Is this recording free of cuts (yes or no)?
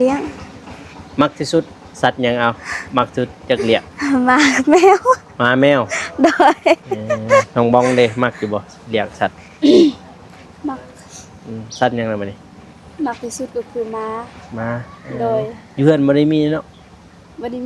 yes